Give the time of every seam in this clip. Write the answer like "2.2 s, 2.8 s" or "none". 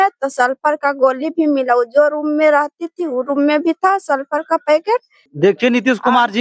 5.2 s